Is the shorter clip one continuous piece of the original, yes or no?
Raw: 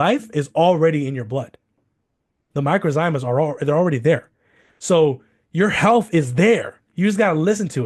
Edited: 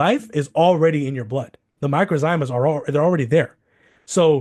no